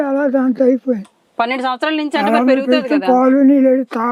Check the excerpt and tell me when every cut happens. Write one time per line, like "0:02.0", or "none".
none